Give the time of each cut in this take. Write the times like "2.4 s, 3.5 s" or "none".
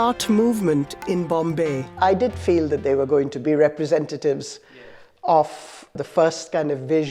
1.8 s, 3.4 s, 6.0 s